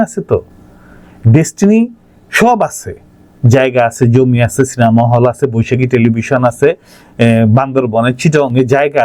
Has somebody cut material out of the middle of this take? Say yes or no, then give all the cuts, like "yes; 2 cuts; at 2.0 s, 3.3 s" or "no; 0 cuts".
no; 0 cuts